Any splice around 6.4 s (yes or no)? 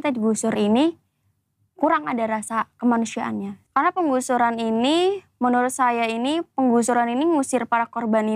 no